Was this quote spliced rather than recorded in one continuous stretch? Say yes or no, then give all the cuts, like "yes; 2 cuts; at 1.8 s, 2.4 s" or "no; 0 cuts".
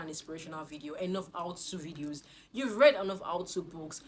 no; 0 cuts